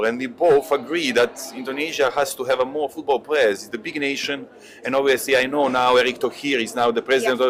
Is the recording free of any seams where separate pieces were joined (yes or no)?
yes